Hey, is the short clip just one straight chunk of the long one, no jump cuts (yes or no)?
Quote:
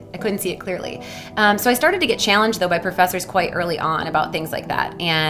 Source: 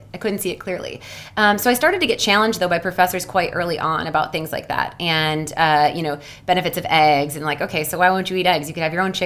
yes